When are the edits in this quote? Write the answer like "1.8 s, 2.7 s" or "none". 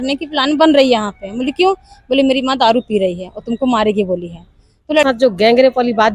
5.0 s